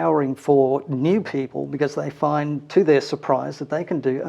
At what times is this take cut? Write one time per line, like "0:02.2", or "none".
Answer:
none

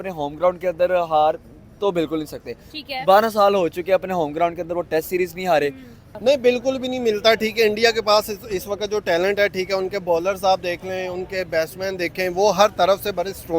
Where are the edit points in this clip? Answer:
0:06.0

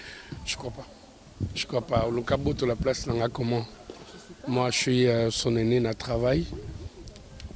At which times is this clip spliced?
none

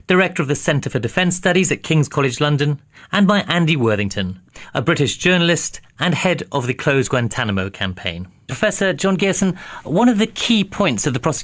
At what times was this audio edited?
none

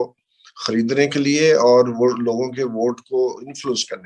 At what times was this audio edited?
none

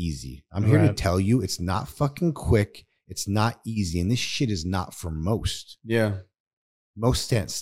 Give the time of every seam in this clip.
none

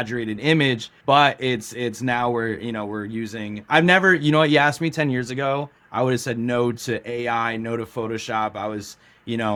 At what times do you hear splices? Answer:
none

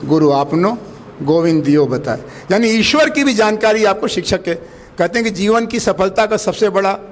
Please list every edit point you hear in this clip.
none

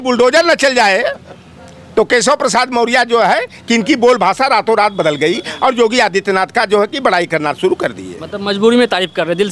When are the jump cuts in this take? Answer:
none

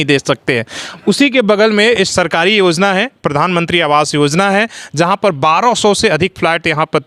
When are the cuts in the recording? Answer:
none

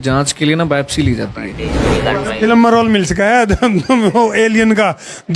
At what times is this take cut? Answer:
0:01.9

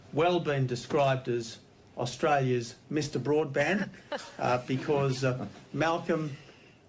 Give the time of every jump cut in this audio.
0:04.3

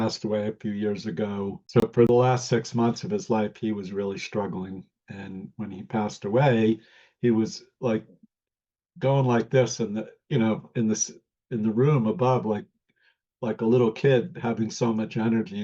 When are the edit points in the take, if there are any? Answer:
0:01.6

